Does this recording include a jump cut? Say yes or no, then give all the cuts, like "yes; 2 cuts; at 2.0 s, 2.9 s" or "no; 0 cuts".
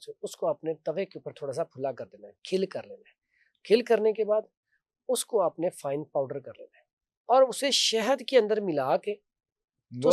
no; 0 cuts